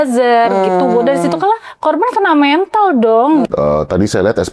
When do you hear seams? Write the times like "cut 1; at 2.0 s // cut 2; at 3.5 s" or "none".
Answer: cut 1; at 3.5 s

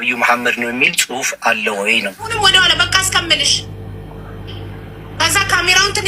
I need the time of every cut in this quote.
cut 1; at 2.3 s

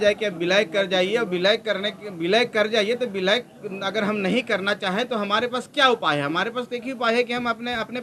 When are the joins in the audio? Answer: none

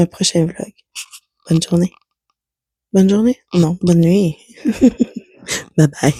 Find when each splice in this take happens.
none

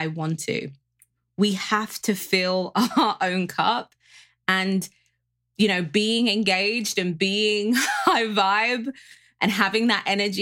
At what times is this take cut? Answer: none

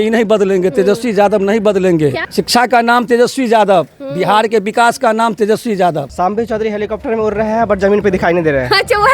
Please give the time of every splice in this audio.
cut 1; at 2.2 s // cut 2; at 6.1 s

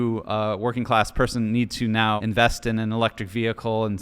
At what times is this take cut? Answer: cut 1; at 2.2 s

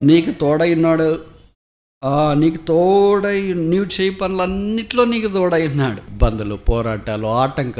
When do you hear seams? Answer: cut 1; at 6.1 s

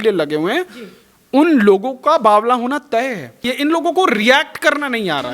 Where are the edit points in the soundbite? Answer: cut 1; at 3.5 s

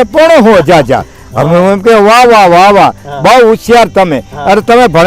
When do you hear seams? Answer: none

